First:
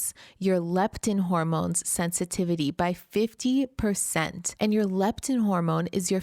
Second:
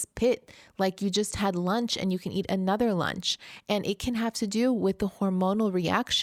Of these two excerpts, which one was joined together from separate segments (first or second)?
first